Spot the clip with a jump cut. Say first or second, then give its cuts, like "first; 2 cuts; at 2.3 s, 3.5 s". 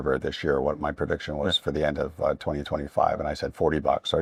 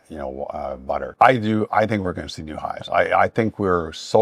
second; 1 cut; at 1.1 s